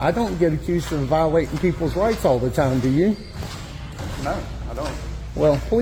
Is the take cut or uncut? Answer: uncut